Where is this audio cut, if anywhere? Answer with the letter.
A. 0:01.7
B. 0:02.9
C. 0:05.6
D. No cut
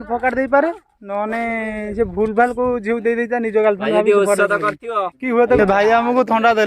C